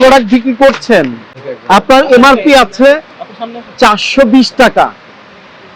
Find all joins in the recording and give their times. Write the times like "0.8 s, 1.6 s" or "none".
1.3 s